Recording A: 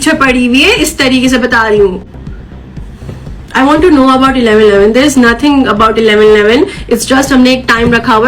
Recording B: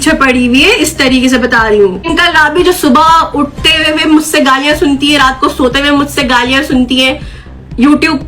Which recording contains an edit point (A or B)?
B